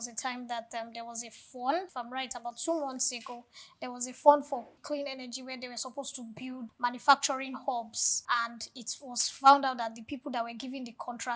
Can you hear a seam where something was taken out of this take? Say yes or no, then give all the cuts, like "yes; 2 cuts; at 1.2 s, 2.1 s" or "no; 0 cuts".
yes; 3 cuts; at 1.8 s, 4.8 s, 6.7 s